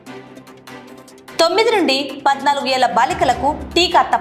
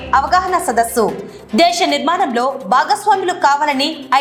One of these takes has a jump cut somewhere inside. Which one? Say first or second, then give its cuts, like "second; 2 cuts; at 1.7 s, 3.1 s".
first; 1 cut; at 1.3 s